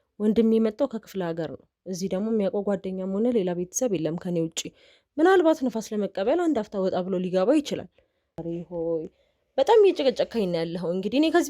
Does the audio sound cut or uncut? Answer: cut